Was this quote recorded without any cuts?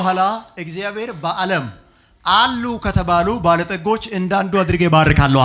yes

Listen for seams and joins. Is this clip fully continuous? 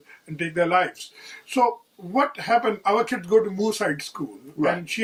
yes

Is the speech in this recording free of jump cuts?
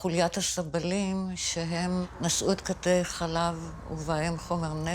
no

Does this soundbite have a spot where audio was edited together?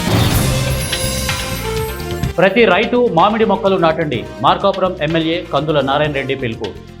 no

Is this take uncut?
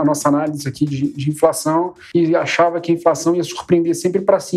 no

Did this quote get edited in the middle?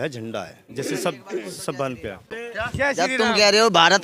yes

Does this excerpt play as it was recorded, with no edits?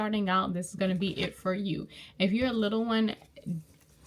yes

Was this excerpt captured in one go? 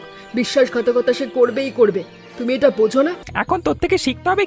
no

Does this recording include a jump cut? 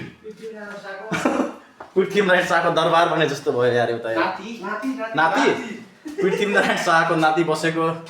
no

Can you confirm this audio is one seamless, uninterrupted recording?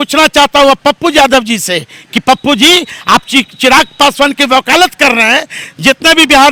yes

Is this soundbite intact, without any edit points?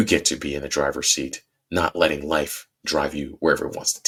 yes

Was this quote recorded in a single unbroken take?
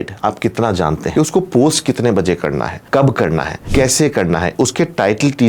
no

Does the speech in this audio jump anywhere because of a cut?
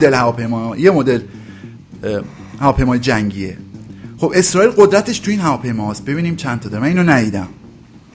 no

